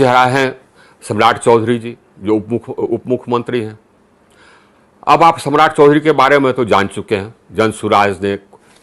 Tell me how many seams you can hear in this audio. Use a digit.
0